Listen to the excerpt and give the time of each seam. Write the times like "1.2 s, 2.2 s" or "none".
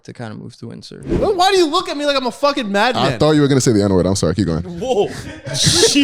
1.1 s